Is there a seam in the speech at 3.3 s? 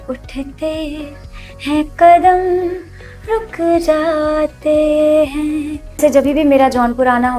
no; 1 cut; at 6.0 s

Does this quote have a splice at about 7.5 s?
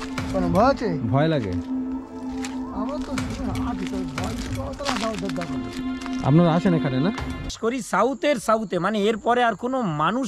yes; 1 cut; at 7.5 s

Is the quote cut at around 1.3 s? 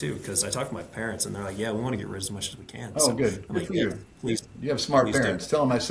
no; 0 cuts

